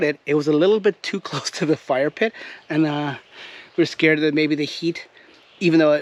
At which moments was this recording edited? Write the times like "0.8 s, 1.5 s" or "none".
none

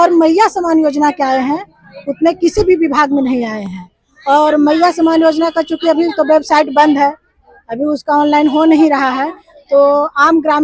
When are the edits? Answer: none

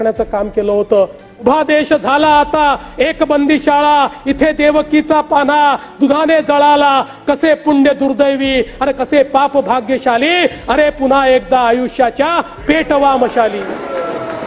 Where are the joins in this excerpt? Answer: 1.3 s

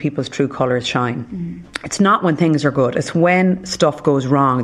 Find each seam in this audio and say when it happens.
none

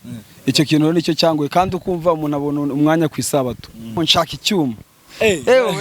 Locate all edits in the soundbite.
3.9 s

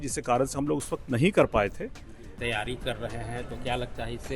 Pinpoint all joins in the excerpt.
2.3 s

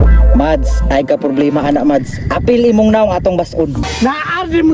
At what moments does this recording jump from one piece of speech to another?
3.8 s

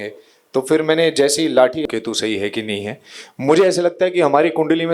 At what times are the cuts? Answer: 1.9 s

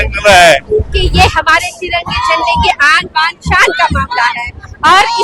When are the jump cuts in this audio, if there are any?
1.0 s

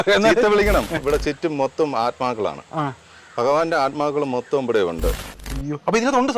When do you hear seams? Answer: 1.0 s, 5.3 s

